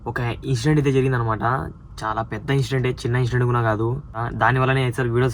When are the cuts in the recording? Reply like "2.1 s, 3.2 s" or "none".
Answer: 4.2 s